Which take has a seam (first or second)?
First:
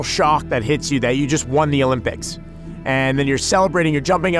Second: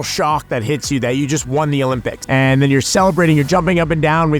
second